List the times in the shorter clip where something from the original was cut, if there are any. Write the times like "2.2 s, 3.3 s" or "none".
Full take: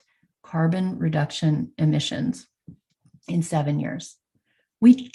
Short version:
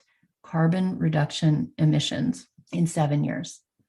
2.5 s